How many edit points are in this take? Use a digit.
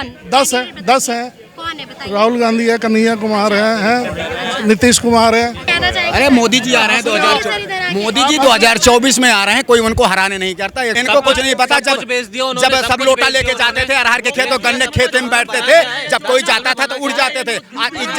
2